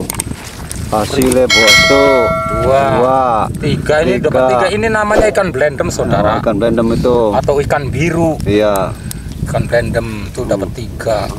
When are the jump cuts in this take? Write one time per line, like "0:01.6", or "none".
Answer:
0:01.8